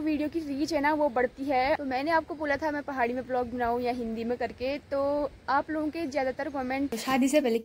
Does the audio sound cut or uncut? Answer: cut